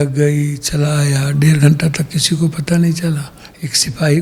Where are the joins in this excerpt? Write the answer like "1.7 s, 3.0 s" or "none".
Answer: none